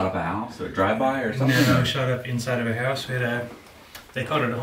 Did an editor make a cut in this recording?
no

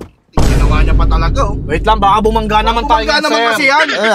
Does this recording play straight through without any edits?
yes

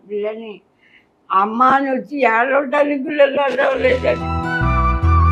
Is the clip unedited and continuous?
yes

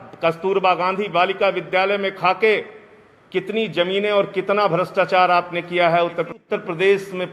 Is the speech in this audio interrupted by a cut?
yes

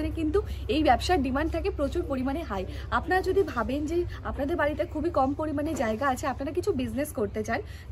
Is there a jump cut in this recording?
no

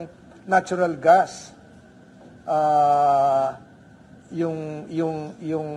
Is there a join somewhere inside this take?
no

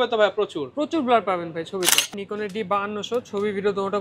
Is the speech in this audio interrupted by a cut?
yes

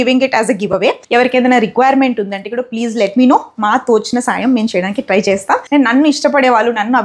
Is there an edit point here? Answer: yes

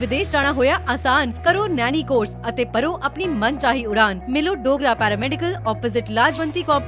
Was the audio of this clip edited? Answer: no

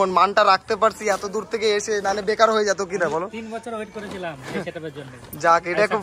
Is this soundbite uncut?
yes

